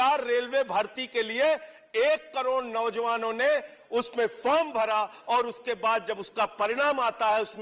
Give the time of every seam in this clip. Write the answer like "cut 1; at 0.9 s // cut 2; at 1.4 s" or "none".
none